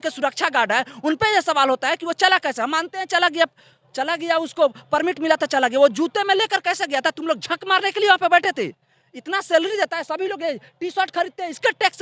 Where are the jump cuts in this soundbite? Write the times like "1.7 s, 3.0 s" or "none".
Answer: none